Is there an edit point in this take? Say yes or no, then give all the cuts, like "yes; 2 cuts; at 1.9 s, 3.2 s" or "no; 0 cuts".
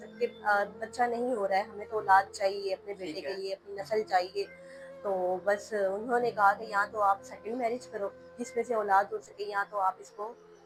no; 0 cuts